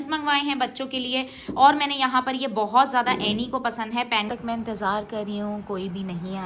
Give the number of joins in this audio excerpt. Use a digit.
1